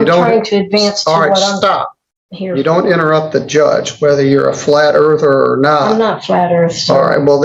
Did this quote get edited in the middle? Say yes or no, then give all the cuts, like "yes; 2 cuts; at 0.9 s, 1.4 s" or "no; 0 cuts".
no; 0 cuts